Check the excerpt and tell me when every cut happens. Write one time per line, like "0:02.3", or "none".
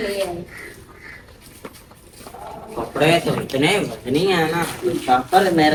none